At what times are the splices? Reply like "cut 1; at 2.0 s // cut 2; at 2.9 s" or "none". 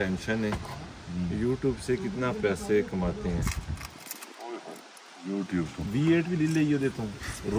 none